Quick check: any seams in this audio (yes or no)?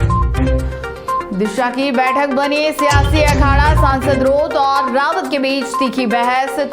yes